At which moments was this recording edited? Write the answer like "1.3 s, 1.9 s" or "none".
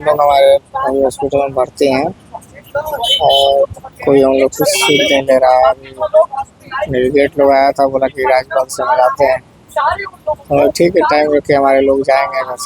none